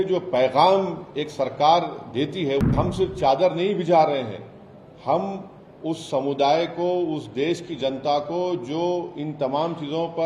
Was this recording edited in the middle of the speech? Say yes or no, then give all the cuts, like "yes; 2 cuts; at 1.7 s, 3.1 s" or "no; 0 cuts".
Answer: yes; 1 cut; at 2.6 s